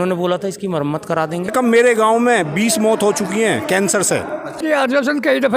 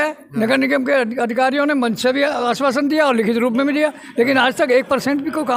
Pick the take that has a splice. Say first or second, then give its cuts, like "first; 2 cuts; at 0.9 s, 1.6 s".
first; 2 cuts; at 1.5 s, 4.6 s